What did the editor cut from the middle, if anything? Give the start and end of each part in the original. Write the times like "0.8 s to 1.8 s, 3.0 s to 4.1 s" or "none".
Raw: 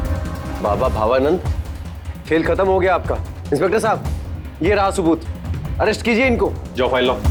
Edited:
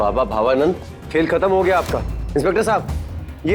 1.6 s to 2.1 s